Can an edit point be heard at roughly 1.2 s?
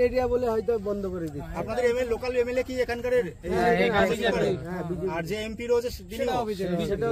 no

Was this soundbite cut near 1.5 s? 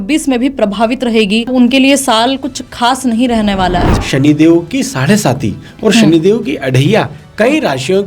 yes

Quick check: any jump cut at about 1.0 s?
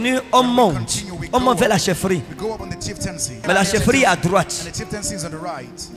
no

